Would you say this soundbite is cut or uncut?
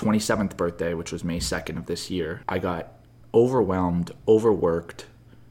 cut